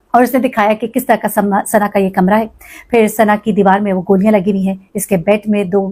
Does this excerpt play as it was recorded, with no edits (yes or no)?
yes